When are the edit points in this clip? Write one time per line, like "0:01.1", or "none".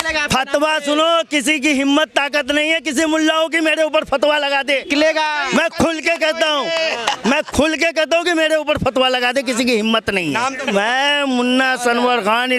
0:10.6